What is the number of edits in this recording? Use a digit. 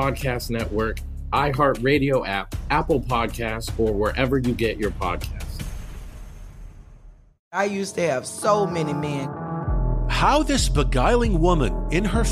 1